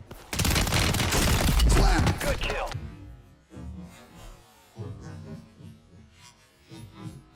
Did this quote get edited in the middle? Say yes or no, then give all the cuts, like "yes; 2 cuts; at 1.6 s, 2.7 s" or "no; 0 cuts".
no; 0 cuts